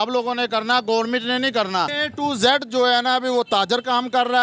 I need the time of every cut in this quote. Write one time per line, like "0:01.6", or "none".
0:02.0